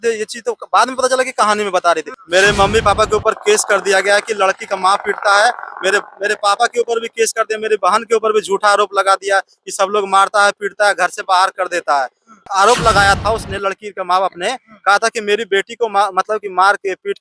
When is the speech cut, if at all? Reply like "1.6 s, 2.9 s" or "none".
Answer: 2.1 s, 12.4 s